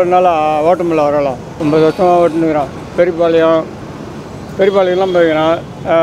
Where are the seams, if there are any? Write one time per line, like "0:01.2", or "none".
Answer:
0:01.5